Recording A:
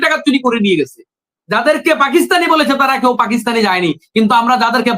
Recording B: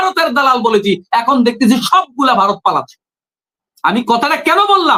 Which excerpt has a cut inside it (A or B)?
A